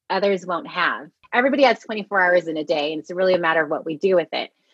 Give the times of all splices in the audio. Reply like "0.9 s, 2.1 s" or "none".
1.2 s